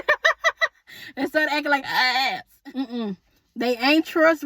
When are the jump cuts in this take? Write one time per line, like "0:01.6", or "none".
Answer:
0:02.5